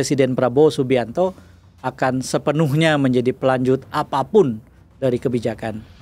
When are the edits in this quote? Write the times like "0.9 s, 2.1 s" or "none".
none